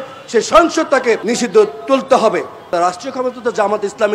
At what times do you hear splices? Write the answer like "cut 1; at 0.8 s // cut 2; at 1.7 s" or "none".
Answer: cut 1; at 1.2 s // cut 2; at 2.7 s